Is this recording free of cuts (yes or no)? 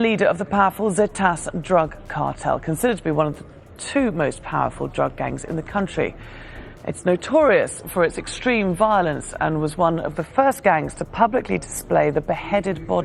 yes